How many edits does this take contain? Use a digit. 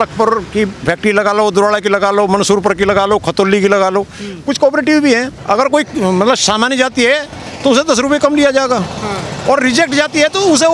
1